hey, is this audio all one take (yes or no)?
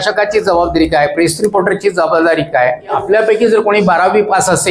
no